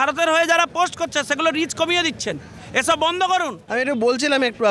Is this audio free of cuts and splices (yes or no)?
no